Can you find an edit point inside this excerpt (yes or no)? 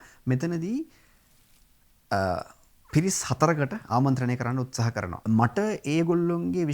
yes